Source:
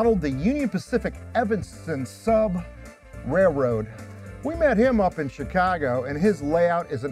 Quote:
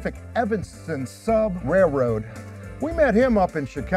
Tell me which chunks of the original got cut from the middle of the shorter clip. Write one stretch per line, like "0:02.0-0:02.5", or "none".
0:02.6-0:03.2